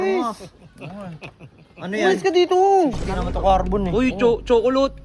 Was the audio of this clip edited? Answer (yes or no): yes